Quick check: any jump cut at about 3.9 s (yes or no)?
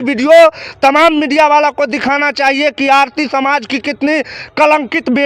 no